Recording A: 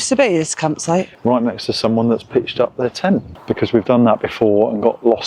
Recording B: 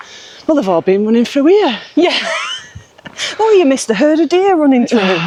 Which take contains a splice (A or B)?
A